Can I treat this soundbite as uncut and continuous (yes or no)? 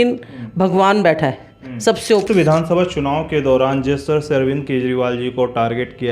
no